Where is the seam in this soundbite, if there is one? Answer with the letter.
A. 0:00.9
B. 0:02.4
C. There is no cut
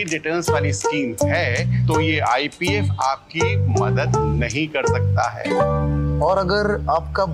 C